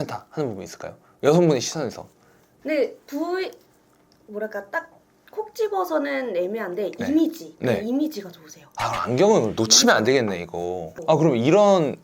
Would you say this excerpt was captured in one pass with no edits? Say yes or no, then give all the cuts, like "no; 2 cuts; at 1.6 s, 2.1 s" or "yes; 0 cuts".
no; 1 cut; at 10.9 s